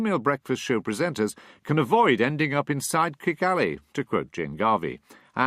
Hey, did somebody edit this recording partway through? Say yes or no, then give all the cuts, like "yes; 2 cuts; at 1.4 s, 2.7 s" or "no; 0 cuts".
yes; 1 cut; at 2.3 s